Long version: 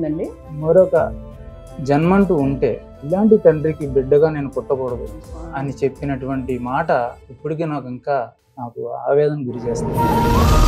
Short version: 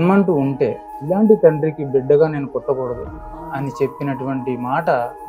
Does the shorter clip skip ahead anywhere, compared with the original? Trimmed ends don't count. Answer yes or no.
no